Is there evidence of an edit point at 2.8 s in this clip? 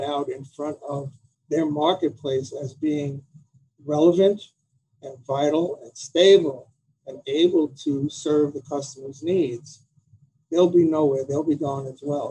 no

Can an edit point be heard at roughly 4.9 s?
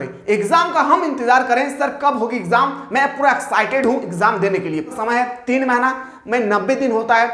yes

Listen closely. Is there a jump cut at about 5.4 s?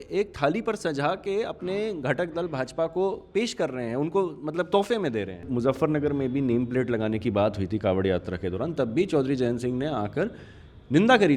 yes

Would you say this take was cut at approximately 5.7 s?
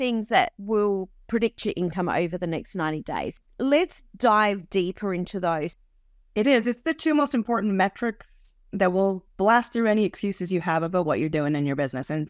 yes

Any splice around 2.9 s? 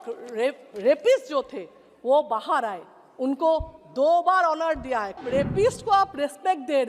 no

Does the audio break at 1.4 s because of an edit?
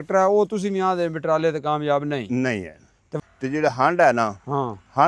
no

